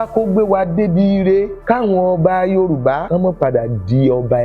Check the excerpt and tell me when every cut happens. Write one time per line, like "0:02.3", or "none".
0:01.6
0:03.0

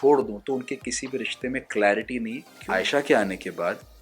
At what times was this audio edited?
0:02.5

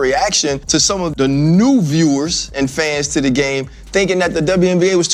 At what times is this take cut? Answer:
none

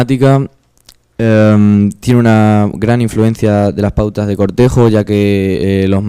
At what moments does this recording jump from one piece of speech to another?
0:02.9

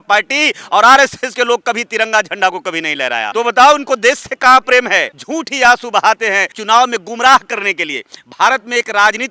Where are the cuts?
0:03.3
0:05.2
0:06.5

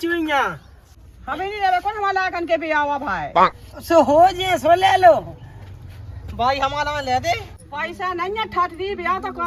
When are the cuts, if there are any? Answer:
0:00.9

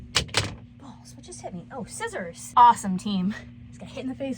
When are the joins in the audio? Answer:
0:02.4

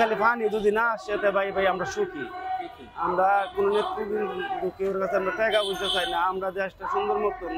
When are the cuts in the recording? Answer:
none

